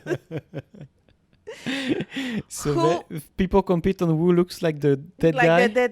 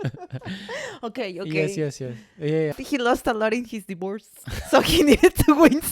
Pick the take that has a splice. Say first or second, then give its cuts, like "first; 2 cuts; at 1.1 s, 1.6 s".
second; 1 cut; at 2.8 s